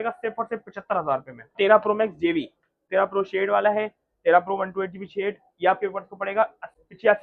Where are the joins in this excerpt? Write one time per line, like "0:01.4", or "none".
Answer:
0:01.5
0:02.8